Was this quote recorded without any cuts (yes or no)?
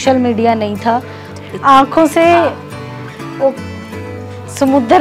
no